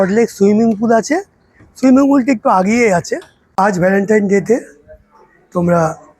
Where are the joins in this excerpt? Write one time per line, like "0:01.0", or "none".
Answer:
0:03.5